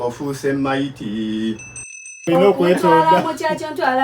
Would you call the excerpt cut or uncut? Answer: cut